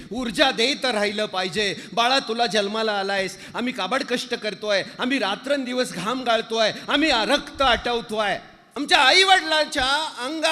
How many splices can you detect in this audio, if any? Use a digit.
1